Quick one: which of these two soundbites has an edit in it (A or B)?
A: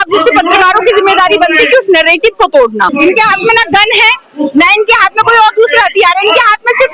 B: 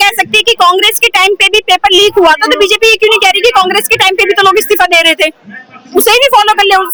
A